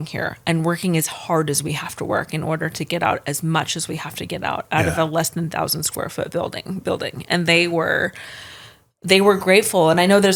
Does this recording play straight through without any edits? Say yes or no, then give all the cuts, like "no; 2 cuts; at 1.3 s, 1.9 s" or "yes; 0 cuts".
yes; 0 cuts